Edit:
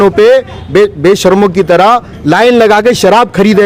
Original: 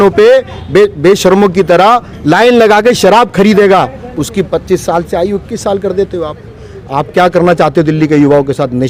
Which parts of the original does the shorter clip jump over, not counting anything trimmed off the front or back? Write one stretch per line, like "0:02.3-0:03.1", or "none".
none